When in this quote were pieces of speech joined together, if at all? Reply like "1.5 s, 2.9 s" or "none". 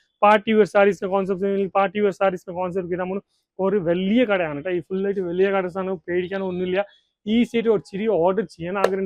none